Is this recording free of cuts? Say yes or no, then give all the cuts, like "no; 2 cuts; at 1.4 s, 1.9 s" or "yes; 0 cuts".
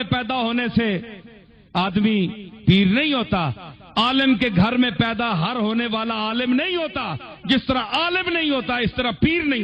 yes; 0 cuts